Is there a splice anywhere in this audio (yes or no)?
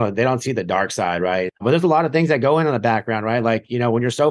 yes